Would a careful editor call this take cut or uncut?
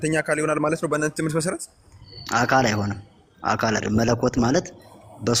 uncut